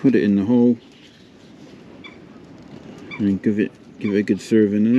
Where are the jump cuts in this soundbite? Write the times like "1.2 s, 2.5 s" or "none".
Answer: none